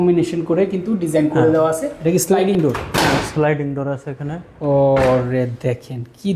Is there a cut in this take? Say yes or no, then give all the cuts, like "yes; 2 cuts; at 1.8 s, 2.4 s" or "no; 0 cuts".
yes; 1 cut; at 1.9 s